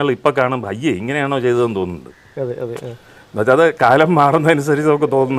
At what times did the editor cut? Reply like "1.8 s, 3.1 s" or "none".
none